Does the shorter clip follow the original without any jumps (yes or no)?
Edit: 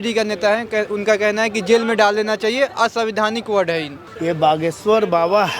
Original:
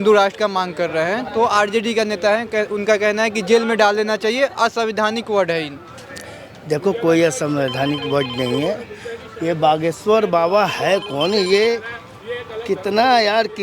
no